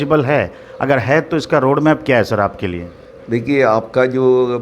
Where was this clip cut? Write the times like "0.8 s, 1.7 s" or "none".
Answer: none